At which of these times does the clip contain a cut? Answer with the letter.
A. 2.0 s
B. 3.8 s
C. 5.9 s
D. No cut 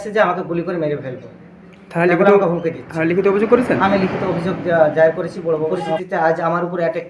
C